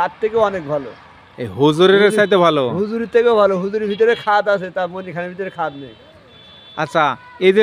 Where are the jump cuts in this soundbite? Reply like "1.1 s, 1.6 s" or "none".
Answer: none